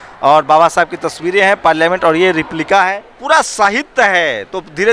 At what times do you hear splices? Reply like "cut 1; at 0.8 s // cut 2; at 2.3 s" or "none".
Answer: cut 1; at 3.1 s